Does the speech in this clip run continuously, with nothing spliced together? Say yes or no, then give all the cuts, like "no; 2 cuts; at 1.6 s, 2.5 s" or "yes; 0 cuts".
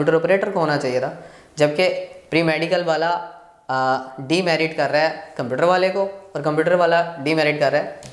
yes; 0 cuts